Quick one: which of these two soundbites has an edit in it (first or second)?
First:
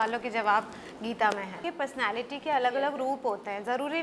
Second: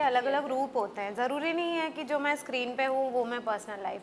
first